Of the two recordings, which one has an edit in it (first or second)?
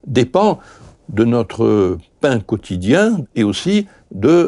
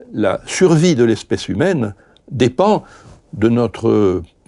first